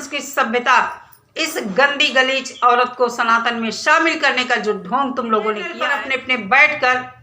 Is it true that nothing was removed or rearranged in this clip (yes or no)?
no